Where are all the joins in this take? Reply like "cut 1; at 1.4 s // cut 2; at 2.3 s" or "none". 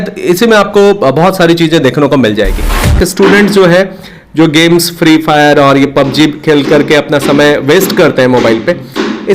cut 1; at 3.0 s